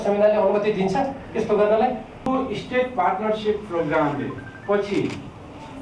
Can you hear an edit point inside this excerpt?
yes; 1 cut; at 2.3 s

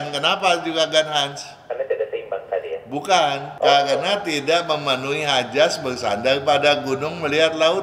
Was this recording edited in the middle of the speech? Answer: yes; 1 cut; at 3.5 s

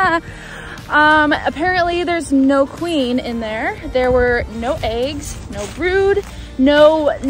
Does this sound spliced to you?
no; 0 cuts

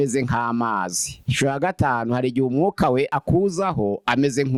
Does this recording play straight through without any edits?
yes; 0 cuts

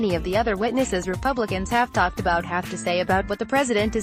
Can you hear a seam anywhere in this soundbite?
no; 0 cuts

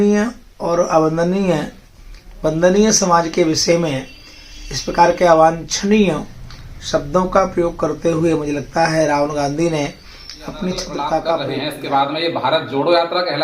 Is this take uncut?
no; 1 cut; at 11.5 s

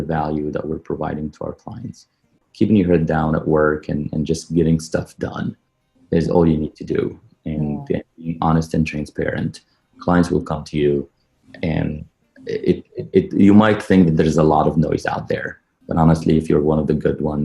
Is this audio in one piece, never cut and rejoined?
no; 1 cut; at 2.4 s

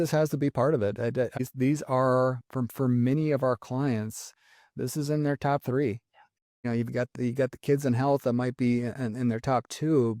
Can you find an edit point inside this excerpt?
no; 0 cuts

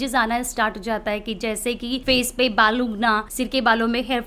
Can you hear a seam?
yes; 2 cuts; at 2.0 s, 3.3 s

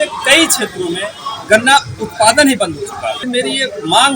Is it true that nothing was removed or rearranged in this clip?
no; 1 cut; at 3.2 s

